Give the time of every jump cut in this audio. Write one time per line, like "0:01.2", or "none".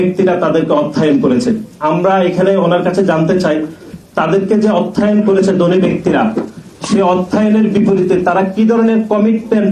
none